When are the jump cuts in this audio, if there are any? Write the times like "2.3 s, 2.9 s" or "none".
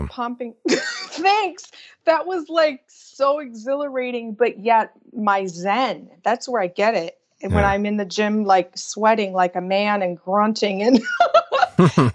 none